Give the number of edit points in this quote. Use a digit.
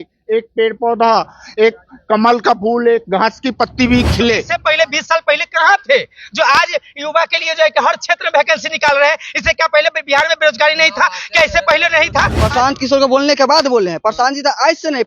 2